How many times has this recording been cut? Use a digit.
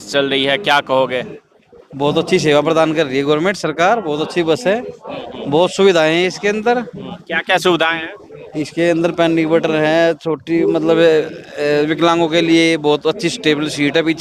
0